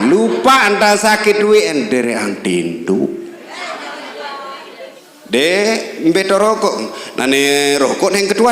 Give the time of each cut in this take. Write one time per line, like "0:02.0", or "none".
0:05.1